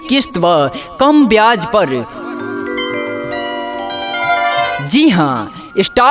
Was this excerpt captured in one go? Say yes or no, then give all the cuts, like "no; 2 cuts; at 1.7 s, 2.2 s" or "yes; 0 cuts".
no; 2 cuts; at 2.1 s, 4.8 s